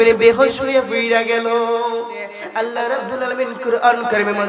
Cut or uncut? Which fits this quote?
cut